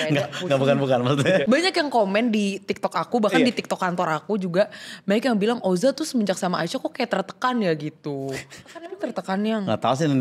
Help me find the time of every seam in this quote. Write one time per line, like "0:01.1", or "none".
0:01.4
0:08.9